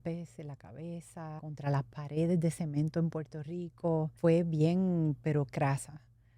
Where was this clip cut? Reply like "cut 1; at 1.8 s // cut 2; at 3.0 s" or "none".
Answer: cut 1; at 1.4 s // cut 2; at 4.1 s